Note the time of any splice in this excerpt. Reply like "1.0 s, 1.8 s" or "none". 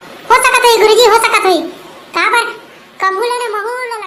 none